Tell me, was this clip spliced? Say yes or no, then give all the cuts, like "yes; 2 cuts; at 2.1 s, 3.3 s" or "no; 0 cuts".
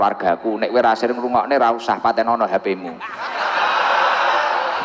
yes; 1 cut; at 1.8 s